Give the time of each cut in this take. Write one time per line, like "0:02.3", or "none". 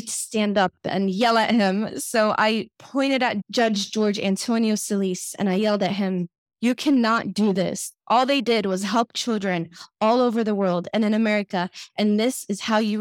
0:03.4